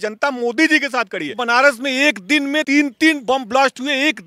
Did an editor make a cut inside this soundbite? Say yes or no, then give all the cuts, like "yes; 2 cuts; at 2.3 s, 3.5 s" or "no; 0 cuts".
yes; 2 cuts; at 1.4 s, 2.6 s